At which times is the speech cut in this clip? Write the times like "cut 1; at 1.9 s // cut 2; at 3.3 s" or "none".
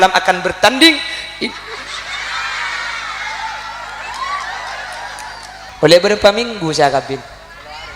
cut 1; at 5.7 s